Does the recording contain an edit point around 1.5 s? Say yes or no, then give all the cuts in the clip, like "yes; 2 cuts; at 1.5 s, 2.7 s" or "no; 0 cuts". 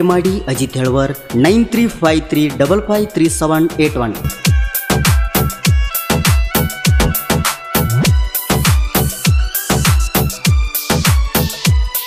no; 1 cut; at 4.3 s